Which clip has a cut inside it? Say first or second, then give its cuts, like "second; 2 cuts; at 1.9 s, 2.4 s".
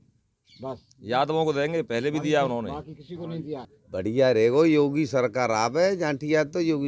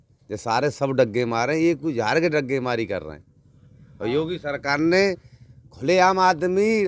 first; 1 cut; at 3.7 s